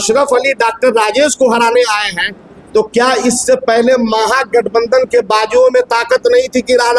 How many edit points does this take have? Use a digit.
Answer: 0